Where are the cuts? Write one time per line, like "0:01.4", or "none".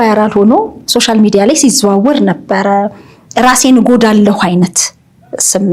none